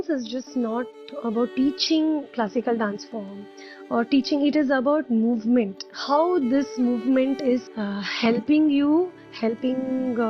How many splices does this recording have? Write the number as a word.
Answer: one